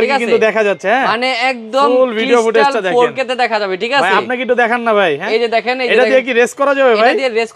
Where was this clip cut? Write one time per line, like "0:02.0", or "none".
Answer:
none